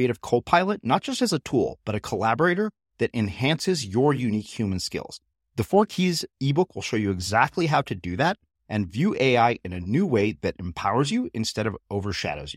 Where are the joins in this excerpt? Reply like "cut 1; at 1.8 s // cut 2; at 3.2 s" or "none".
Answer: none